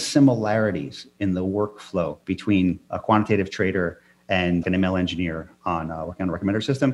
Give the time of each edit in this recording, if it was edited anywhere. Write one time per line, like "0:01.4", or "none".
0:01.0
0:02.5
0:04.6